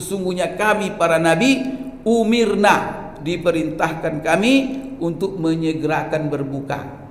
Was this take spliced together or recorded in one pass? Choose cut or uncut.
uncut